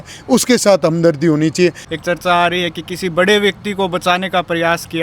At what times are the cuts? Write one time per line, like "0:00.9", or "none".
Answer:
0:01.8